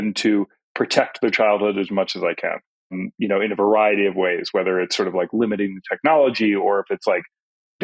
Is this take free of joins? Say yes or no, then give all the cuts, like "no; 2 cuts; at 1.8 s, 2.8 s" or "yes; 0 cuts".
yes; 0 cuts